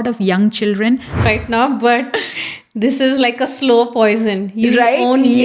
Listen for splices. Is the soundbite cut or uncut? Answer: cut